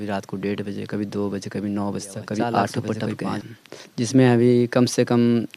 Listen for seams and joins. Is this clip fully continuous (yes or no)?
no